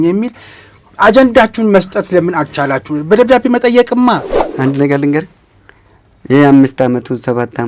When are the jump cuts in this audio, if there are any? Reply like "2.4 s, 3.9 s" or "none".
4.4 s